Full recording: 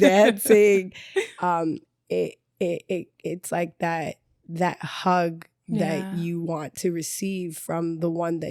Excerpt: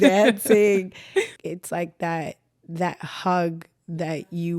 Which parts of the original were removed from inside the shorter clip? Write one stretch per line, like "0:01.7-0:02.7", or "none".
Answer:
0:01.3-0:03.1